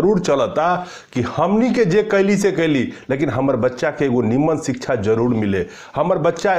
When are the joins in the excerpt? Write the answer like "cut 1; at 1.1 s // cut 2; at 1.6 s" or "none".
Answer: none